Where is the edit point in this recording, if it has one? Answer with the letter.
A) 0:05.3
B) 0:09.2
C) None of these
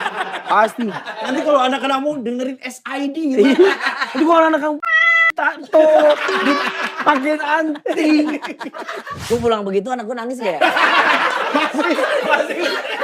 B